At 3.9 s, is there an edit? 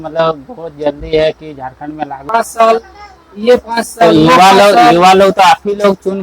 no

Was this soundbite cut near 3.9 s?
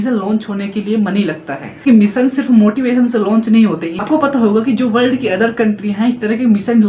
yes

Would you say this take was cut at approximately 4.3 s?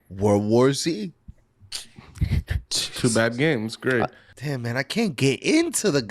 yes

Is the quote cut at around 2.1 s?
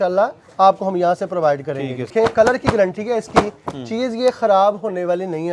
yes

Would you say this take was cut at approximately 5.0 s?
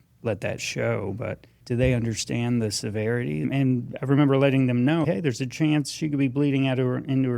yes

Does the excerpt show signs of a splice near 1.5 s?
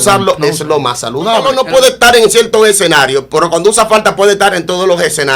yes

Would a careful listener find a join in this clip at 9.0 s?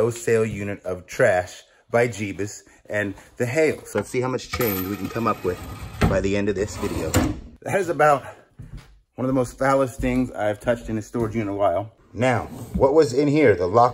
no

